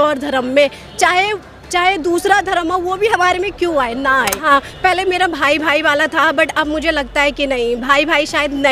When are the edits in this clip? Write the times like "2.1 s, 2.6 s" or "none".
4.4 s